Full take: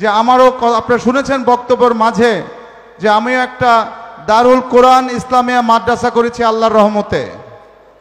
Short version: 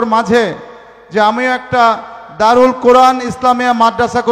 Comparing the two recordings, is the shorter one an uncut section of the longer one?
yes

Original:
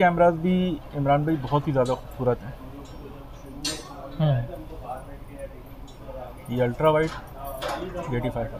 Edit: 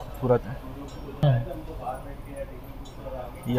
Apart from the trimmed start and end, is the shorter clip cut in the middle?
yes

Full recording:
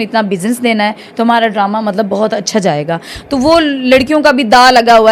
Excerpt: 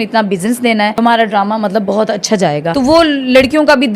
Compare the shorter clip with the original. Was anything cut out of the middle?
yes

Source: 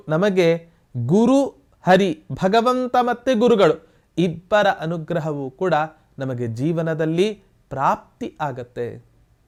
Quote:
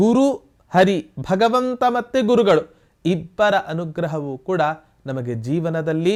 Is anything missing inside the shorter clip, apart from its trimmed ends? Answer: no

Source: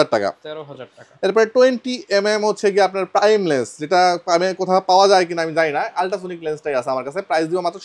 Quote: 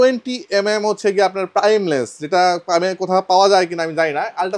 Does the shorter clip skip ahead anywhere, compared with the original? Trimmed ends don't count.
no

